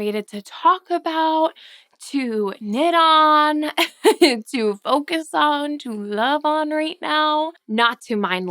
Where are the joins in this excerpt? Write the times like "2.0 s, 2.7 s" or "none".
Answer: 7.6 s